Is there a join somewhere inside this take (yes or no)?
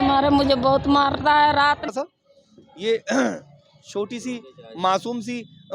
yes